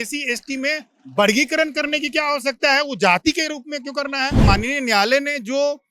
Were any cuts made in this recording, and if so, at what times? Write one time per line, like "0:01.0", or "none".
0:04.4